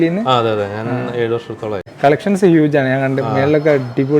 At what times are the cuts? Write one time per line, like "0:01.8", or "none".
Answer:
0:01.9